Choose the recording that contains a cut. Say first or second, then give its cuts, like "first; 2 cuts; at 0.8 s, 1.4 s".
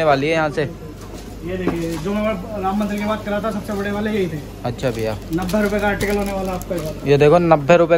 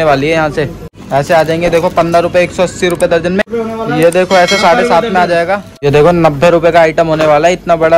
second; 3 cuts; at 1.0 s, 3.4 s, 5.7 s